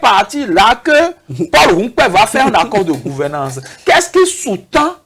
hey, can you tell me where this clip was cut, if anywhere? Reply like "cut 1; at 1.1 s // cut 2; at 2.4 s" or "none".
none